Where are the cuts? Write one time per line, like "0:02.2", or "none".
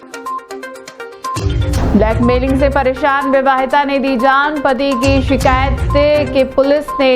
0:01.0